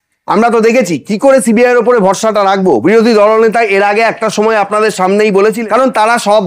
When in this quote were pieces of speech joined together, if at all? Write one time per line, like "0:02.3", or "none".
0:05.6